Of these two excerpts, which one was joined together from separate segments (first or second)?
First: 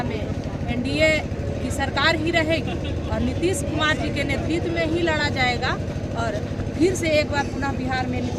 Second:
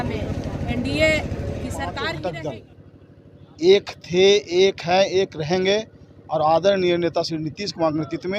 second